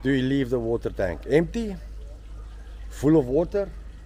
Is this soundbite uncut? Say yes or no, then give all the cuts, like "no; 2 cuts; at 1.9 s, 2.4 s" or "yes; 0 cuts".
yes; 0 cuts